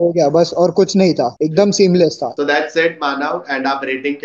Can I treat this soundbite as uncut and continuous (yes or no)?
no